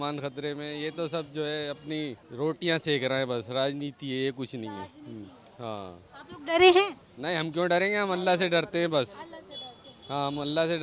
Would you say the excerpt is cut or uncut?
cut